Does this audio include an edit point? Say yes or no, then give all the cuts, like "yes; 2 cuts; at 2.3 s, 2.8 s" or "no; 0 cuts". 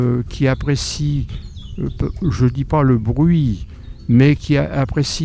no; 0 cuts